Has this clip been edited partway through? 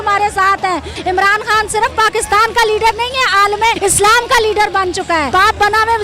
yes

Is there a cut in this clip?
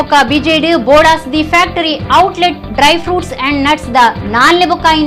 no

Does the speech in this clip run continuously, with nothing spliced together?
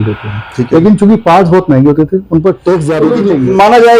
no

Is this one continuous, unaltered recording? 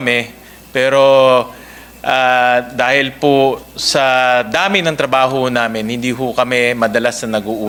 yes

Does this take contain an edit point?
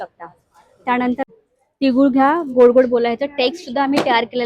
yes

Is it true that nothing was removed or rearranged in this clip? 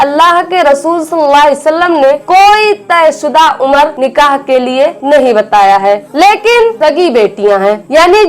no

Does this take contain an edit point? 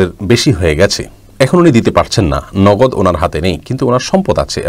no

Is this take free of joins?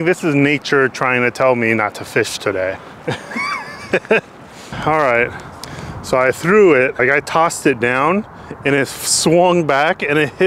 yes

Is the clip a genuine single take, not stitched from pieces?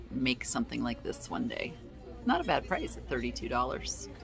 yes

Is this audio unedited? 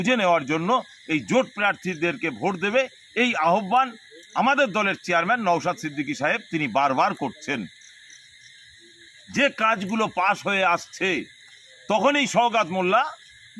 no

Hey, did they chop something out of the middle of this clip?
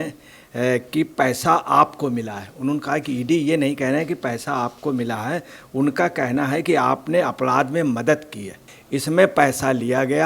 yes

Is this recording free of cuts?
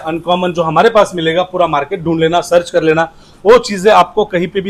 yes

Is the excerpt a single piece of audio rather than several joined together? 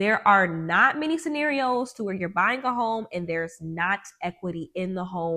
yes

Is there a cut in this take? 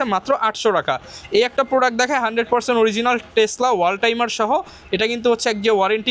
no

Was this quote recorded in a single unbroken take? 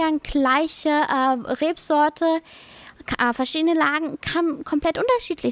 yes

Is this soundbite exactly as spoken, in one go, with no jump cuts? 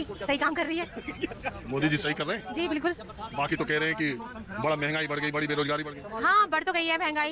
yes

